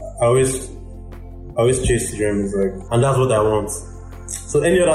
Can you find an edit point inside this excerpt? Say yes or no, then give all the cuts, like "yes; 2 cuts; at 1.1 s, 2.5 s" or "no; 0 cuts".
yes; 1 cut; at 2.8 s